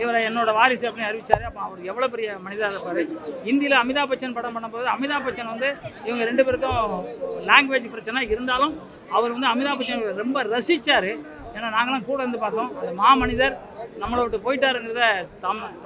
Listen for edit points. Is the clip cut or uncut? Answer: uncut